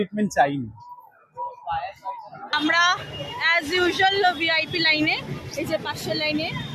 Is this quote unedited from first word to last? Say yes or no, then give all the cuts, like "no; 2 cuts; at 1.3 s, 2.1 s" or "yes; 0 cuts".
no; 1 cut; at 2.5 s